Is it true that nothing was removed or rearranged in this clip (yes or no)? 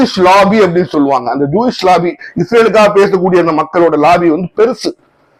yes